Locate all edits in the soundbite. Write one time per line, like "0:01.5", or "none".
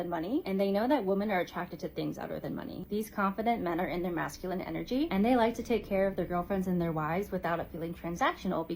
0:03.5

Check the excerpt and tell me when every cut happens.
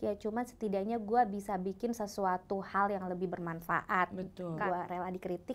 0:04.6

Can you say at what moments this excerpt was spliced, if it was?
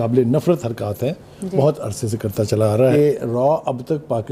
0:02.9

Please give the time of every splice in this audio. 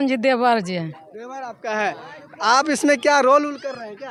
none

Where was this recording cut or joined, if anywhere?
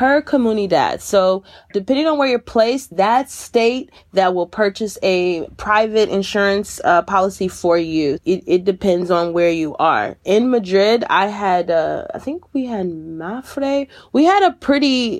none

